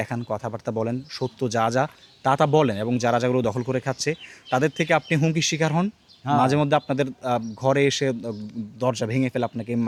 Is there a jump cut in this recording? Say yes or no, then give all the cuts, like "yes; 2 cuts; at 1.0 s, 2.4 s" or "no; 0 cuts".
no; 0 cuts